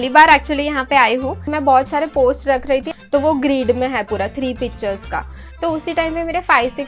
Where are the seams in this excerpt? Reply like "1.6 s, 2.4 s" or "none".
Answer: 1.4 s, 2.9 s, 5.4 s